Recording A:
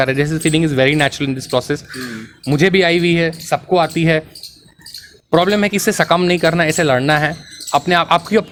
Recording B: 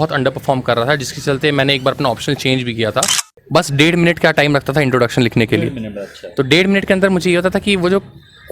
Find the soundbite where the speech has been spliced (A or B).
B